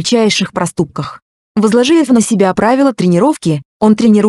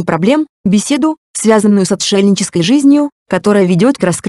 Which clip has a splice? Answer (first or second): second